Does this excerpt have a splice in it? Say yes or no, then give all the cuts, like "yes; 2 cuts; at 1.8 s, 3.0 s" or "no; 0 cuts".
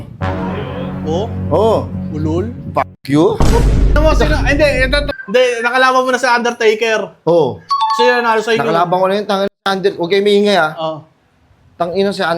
yes; 1 cut; at 5.1 s